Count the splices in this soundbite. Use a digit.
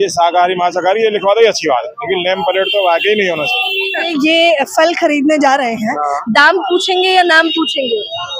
1